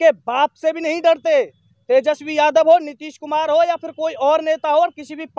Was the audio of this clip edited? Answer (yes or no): no